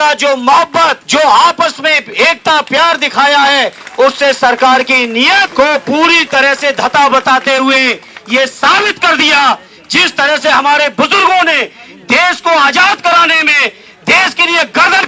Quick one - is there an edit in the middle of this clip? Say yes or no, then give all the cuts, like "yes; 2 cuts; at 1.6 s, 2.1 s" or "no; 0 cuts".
yes; 2 cuts; at 1.0 s, 5.5 s